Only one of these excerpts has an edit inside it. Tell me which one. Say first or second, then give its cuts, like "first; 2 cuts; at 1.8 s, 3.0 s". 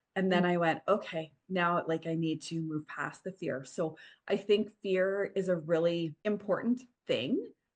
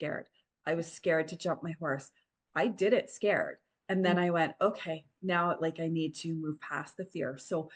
first; 1 cut; at 6.1 s